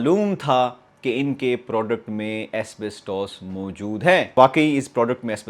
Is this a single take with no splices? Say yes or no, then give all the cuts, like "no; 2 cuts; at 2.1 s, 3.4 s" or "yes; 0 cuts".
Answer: no; 1 cut; at 4.3 s